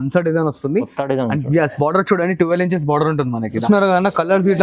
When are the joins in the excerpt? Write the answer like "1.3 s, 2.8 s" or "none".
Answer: 3.6 s